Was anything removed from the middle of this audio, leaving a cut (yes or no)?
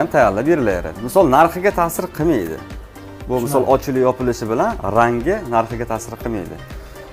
no